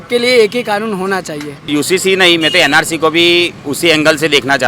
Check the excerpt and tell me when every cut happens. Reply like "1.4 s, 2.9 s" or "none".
1.7 s